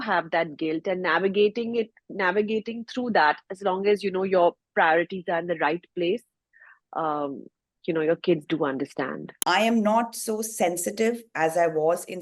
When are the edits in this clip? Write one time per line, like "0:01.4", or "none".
0:09.2

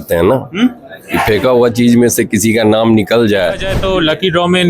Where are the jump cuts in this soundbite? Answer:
0:03.7

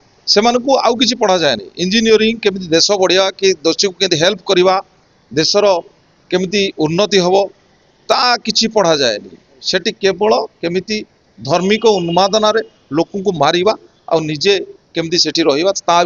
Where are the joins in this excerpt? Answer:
none

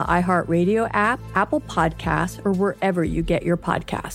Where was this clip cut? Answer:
0:01.1

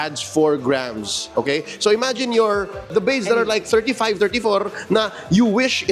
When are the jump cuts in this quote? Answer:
0:02.9

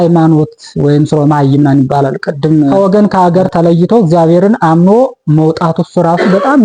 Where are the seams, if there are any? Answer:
0:02.7

